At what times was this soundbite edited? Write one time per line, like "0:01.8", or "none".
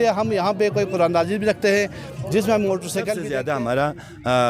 0:03.2